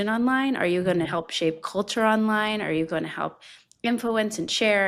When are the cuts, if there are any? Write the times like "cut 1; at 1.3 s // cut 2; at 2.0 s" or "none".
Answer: none